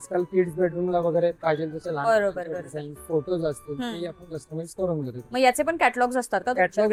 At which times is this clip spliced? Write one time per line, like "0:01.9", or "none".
none